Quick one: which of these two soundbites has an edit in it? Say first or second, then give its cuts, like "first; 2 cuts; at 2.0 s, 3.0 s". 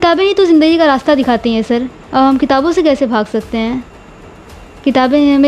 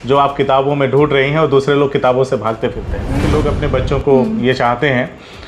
second; 1 cut; at 3.2 s